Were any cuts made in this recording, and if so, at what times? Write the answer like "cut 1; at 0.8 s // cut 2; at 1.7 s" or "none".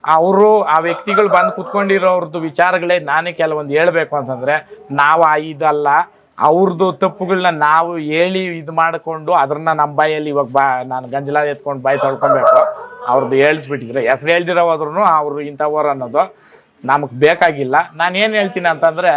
none